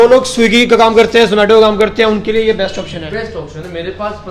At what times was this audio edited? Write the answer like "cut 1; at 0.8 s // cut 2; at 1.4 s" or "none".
none